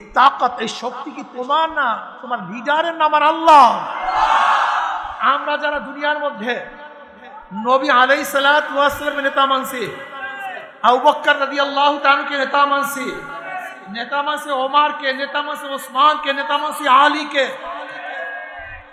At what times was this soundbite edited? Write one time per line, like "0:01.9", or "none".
0:05.2